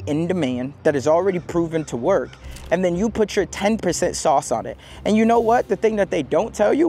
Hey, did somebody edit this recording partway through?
no; 0 cuts

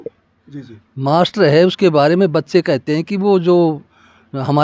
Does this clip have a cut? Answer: no; 0 cuts

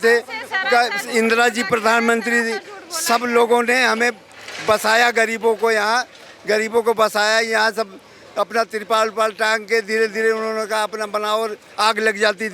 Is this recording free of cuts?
yes; 0 cuts

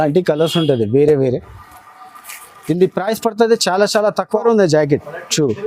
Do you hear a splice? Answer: yes; 1 cut; at 4.3 s

